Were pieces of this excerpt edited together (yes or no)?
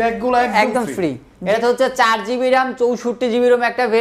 yes